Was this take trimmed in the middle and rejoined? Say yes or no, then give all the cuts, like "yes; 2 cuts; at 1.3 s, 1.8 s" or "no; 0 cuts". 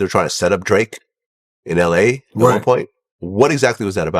no; 0 cuts